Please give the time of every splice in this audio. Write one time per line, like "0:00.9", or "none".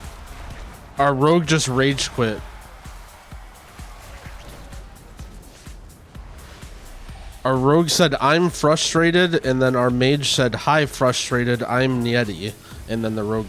none